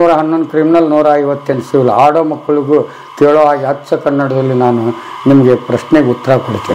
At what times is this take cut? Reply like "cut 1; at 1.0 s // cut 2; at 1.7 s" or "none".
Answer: none